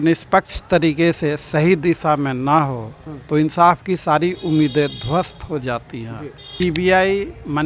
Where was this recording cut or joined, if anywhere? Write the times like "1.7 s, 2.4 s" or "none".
6.5 s